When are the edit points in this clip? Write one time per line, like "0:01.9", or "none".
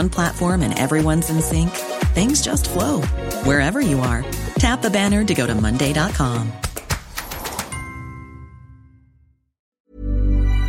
0:09.6